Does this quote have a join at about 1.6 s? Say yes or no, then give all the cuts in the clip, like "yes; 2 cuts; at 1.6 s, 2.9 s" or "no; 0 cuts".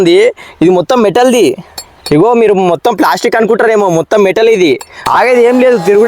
no; 1 cut; at 5.1 s